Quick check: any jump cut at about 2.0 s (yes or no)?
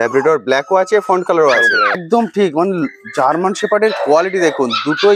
yes